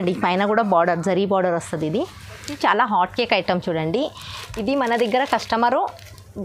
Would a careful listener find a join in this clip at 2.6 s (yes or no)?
yes